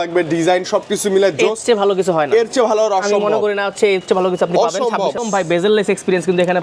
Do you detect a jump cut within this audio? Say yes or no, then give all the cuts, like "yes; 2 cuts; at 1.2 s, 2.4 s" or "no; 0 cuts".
yes; 1 cut; at 5.2 s